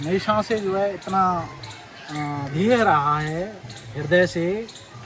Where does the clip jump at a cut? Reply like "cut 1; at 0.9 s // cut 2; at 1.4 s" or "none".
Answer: none